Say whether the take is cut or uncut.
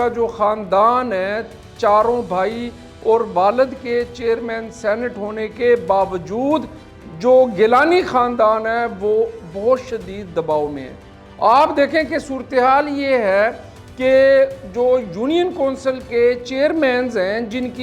uncut